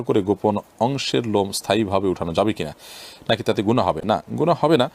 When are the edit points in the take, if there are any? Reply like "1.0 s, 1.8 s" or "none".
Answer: none